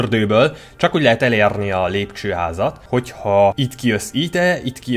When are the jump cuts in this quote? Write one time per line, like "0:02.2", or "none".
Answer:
0:02.8
0:03.7